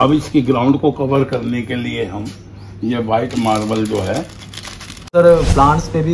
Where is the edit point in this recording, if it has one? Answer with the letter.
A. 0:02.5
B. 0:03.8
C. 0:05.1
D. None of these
C